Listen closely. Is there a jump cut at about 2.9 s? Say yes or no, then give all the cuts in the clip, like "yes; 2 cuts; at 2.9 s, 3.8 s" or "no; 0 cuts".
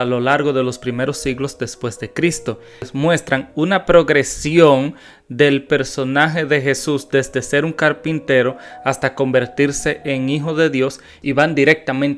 yes; 2 cuts; at 2.9 s, 11.1 s